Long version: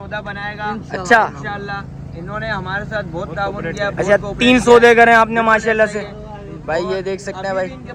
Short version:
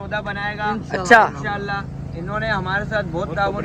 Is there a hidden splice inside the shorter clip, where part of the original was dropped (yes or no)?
no